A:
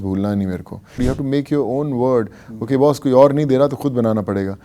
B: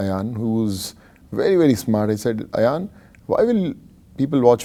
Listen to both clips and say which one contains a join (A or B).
A